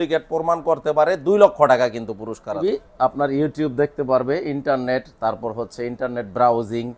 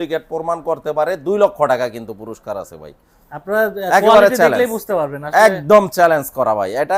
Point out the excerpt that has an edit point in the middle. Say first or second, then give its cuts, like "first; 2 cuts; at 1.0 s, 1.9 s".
first; 1 cut; at 2.6 s